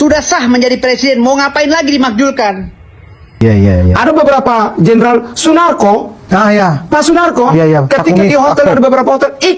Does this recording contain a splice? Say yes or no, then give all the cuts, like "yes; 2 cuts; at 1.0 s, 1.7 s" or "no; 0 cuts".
yes; 1 cut; at 3.4 s